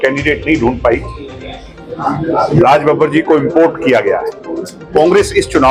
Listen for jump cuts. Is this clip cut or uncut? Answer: uncut